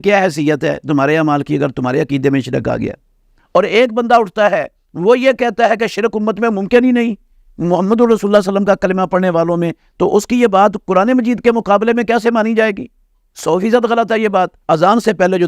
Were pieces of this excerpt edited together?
yes; 2 cuts; at 3.3 s, 14.6 s

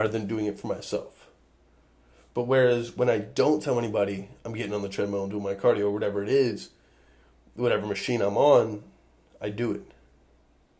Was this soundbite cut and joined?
no; 0 cuts

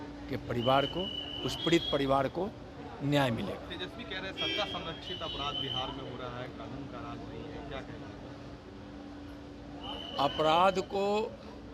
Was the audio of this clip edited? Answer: no; 0 cuts

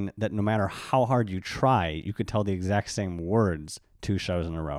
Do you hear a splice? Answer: no; 0 cuts

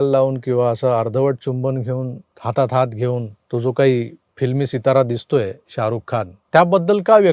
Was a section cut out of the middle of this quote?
no; 0 cuts

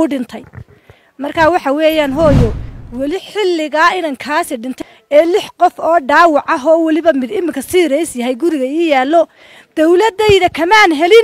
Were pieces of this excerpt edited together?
no; 0 cuts

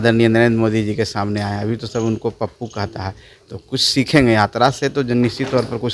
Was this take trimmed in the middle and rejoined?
no; 0 cuts

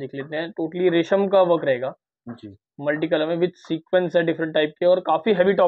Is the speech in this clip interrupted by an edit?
no; 0 cuts

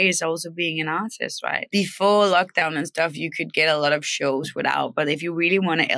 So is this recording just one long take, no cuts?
no; 1 cut; at 1.7 s

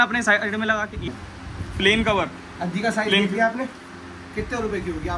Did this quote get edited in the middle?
yes; 1 cut; at 1.1 s

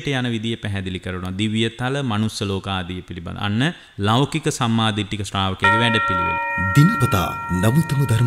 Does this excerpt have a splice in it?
yes; 2 cuts; at 3.9 s, 6.5 s

